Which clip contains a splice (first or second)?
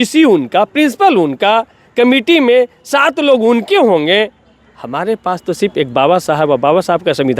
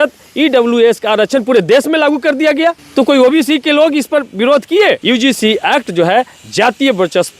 second